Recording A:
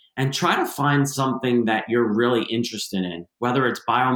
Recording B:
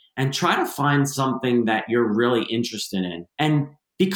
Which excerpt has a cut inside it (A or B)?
B